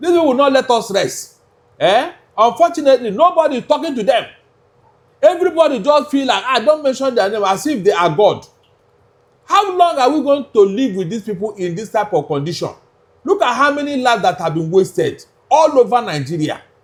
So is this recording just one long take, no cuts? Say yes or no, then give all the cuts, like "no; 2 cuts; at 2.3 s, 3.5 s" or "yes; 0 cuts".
yes; 0 cuts